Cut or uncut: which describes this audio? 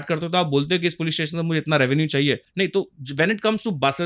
cut